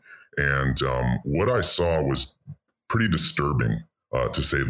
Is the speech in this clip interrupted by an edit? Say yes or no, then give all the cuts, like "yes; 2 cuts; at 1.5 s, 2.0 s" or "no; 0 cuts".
no; 0 cuts